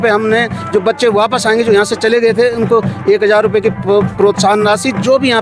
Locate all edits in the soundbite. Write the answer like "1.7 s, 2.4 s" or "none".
none